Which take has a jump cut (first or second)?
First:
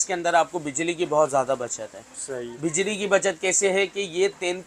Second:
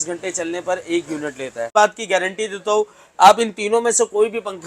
second